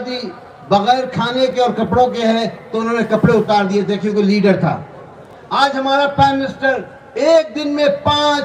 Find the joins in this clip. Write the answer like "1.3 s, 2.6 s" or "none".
none